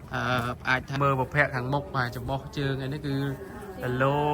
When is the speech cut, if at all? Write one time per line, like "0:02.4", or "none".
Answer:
0:01.0